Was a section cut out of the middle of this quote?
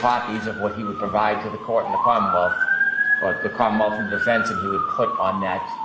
no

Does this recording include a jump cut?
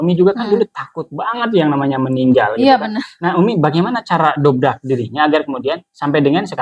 no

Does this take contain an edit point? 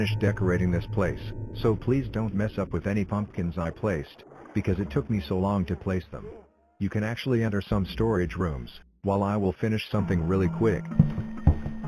yes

